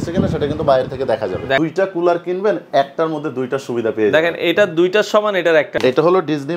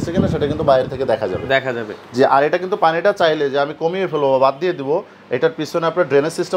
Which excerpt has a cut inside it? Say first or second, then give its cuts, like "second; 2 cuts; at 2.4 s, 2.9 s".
first; 2 cuts; at 1.6 s, 5.7 s